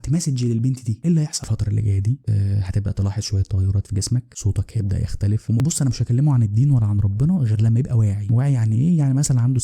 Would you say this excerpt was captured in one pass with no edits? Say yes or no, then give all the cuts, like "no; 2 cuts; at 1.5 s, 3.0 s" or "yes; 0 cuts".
no; 2 cuts; at 1.4 s, 5.6 s